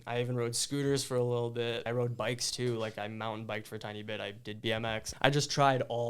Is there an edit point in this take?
yes; 2 cuts; at 1.9 s, 5.1 s

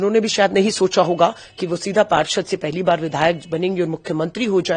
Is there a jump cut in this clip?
no; 0 cuts

